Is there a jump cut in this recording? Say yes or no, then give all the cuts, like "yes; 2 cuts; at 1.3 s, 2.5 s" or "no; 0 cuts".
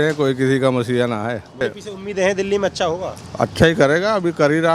yes; 1 cut; at 1.6 s